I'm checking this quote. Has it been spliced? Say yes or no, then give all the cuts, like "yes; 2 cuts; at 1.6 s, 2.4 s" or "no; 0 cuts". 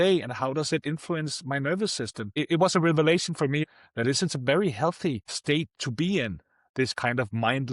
yes; 3 cuts; at 2.3 s, 3.6 s, 5.3 s